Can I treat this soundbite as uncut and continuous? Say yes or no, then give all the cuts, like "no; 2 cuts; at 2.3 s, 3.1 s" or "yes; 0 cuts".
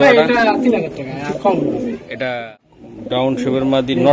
no; 1 cut; at 2.5 s